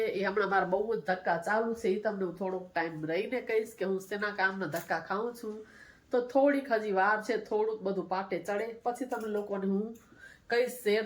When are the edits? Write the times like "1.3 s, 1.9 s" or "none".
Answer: none